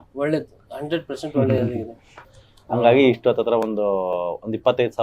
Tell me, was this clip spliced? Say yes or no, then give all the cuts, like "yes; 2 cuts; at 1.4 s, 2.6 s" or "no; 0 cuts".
yes; 1 cut; at 2.2 s